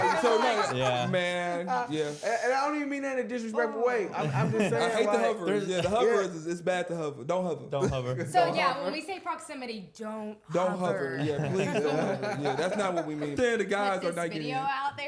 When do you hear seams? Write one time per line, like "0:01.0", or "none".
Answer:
0:13.3